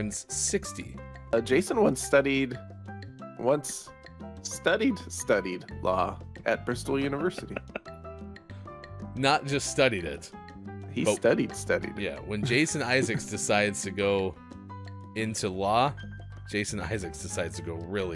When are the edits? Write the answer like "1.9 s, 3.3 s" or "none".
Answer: 1.3 s, 8.5 s